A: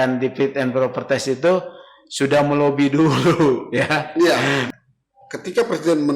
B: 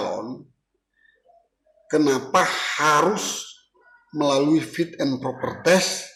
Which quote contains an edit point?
A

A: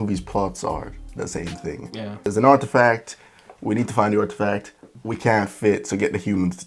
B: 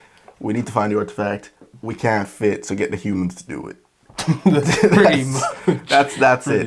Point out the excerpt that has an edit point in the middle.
A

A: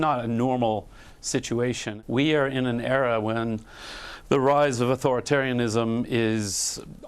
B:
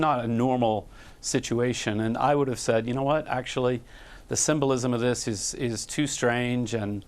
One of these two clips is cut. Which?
A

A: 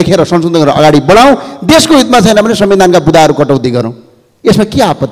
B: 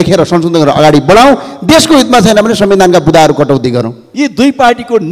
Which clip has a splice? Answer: B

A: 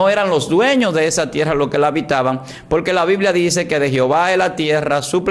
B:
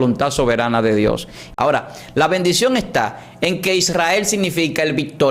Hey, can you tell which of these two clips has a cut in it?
B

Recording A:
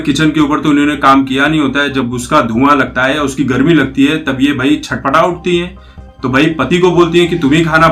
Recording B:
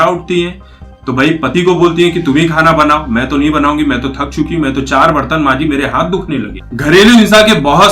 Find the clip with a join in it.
B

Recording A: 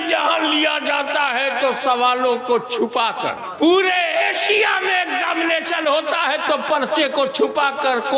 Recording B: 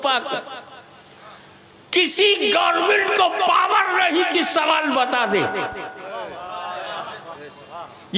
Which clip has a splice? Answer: A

